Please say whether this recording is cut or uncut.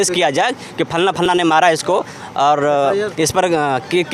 uncut